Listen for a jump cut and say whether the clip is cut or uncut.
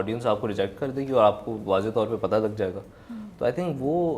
uncut